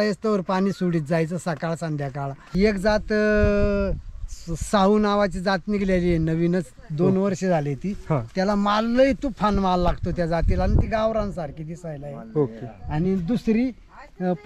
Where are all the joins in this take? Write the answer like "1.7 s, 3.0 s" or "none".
2.4 s

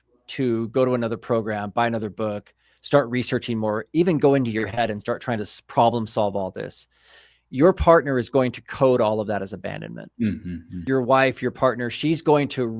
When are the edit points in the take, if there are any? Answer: 10.8 s

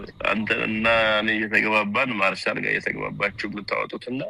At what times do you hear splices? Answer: none

